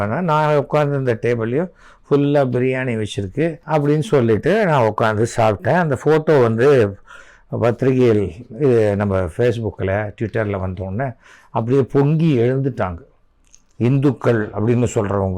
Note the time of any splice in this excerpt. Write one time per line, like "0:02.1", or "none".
0:03.6